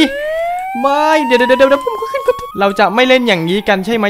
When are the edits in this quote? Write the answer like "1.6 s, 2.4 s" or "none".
2.5 s

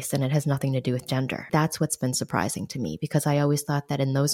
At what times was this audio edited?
1.5 s

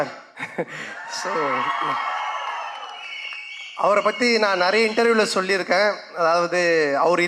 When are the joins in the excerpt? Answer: none

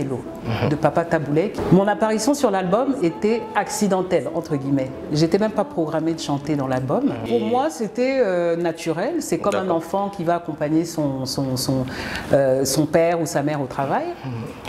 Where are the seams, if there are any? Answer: 1.5 s, 7.2 s

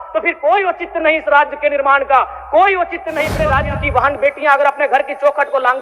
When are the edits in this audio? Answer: 3.3 s

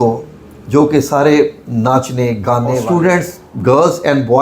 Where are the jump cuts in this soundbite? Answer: 2.8 s

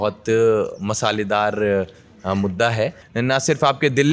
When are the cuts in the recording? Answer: 3.0 s

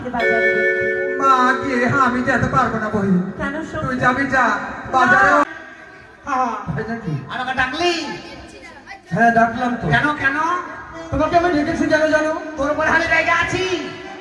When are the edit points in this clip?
5.4 s

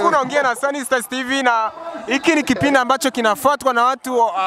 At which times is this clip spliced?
none

